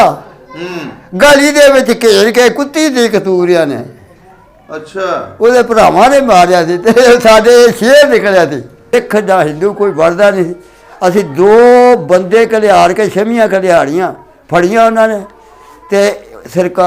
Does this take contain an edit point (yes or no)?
yes